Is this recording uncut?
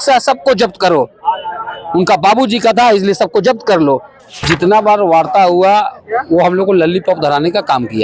no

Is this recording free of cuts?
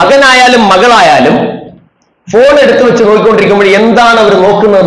yes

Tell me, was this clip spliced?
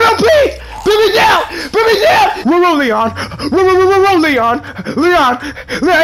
yes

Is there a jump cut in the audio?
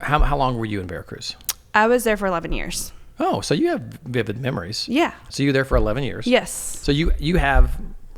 yes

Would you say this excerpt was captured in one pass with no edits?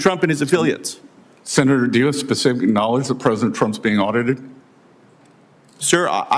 no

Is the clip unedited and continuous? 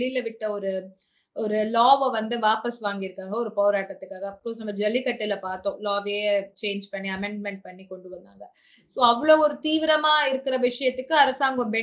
yes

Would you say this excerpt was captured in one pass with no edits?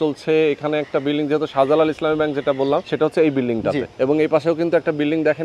no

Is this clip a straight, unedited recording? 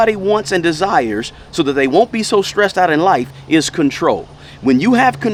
yes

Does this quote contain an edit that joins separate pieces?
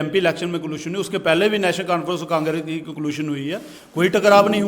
no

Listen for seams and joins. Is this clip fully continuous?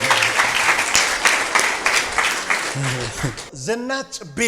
no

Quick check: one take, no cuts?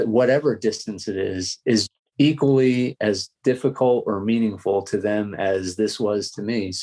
yes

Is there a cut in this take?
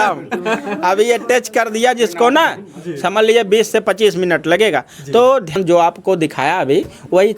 yes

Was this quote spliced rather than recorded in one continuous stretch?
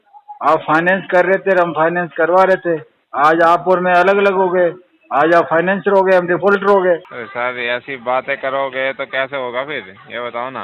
yes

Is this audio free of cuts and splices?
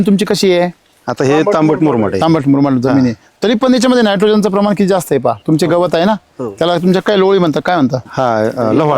no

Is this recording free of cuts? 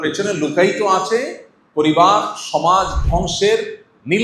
yes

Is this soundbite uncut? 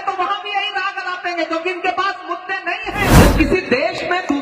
no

